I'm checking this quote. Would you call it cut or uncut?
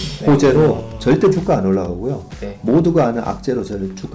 uncut